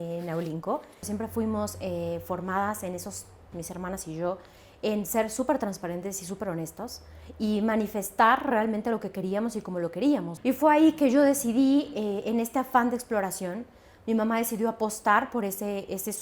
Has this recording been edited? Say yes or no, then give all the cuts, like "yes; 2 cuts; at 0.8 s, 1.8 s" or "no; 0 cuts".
yes; 2 cuts; at 1.1 s, 10.3 s